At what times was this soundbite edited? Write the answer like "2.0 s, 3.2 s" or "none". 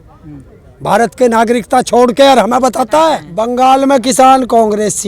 3.3 s